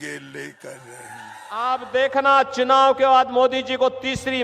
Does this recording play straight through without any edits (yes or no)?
no